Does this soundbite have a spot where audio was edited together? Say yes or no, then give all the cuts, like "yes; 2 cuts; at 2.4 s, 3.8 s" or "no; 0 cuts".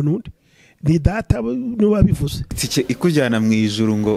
yes; 1 cut; at 2.6 s